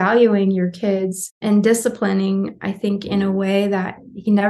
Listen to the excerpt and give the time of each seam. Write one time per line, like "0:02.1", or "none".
0:01.4